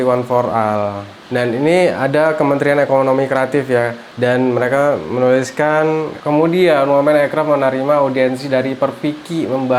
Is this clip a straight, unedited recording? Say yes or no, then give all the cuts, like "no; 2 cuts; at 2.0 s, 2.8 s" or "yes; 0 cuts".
yes; 0 cuts